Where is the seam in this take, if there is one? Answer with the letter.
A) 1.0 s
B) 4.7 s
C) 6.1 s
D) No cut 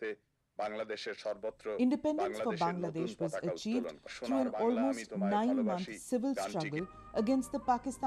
B